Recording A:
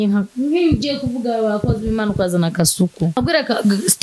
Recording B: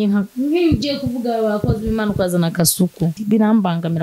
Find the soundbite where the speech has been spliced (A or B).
B